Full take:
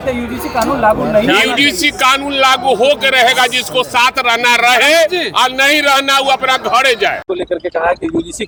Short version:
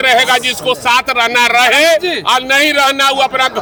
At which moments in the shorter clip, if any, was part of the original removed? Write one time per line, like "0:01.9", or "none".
none